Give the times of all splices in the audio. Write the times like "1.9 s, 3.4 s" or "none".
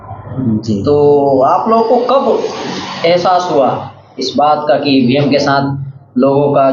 none